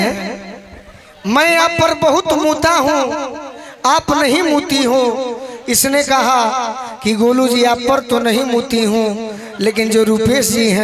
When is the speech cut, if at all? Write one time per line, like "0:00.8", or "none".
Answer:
none